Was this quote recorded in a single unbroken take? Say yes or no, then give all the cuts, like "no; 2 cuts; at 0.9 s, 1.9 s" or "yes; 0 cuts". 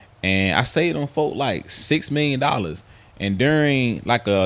yes; 0 cuts